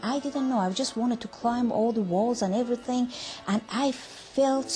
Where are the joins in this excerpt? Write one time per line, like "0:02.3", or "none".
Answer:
0:02.3